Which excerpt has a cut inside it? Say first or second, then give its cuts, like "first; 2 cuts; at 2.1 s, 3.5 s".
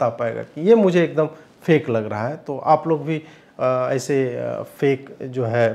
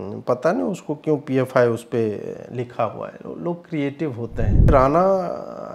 second; 1 cut; at 4.7 s